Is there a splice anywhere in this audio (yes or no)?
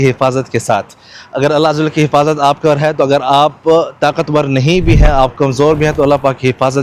no